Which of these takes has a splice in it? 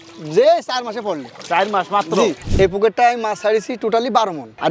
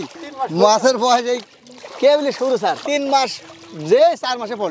first; 1 cut; at 2.4 s

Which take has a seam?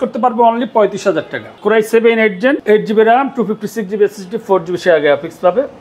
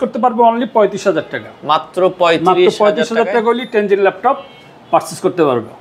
first; 2 cuts; at 1.5 s, 2.6 s

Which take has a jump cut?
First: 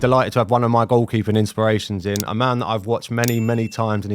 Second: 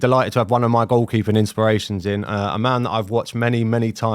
first; 1 cut; at 2.3 s

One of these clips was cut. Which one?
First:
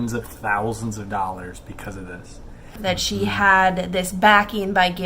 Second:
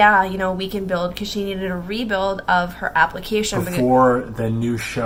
first; 1 cut; at 2.7 s

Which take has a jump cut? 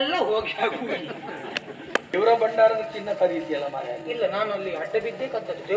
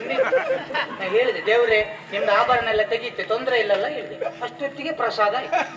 first; 1 cut; at 2.1 s

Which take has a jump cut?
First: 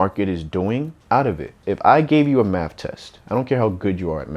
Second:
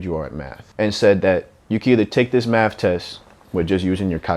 first; 2 cuts; at 1.0 s, 1.6 s

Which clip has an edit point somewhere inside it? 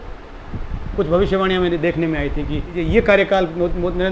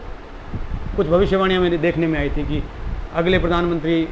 first; 1 cut; at 2.8 s

